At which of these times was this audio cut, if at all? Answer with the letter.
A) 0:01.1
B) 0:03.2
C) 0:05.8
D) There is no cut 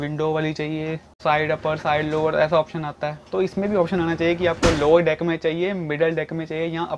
A